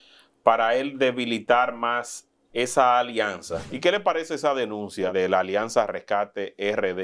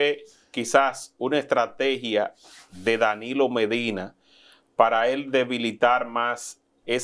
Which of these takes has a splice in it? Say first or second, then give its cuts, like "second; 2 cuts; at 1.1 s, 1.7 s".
first; 2 cuts; at 3.6 s, 5.1 s